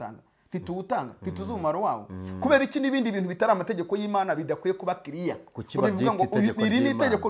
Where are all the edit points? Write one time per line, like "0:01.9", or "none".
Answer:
none